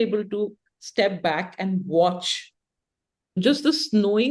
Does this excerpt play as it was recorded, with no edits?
no; 1 cut; at 3.4 s

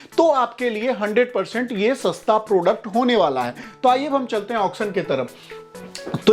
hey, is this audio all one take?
yes; 0 cuts

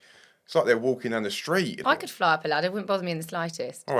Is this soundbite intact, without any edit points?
no; 1 cut; at 1.8 s

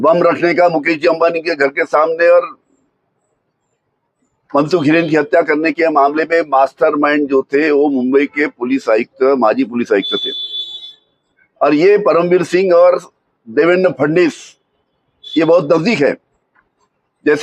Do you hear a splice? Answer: no; 0 cuts

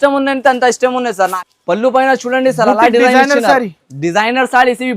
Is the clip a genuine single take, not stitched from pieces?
no; 1 cut; at 1.3 s

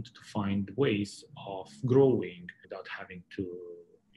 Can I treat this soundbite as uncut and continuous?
no; 1 cut; at 2.6 s

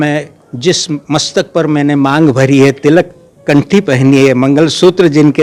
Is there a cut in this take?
no; 0 cuts

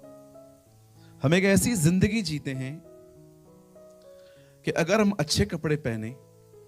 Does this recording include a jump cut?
yes; 3 cuts; at 1.1 s, 2.8 s, 4.6 s

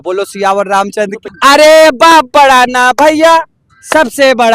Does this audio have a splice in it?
yes; 1 cut; at 1.2 s

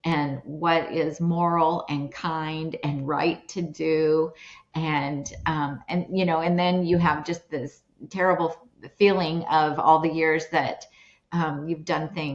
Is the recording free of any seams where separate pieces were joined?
yes; 0 cuts

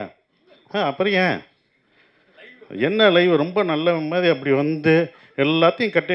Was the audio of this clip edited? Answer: no; 0 cuts

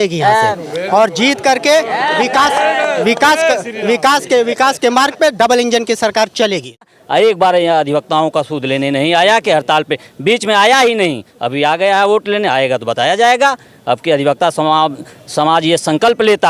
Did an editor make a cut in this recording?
yes; 1 cut; at 6.9 s

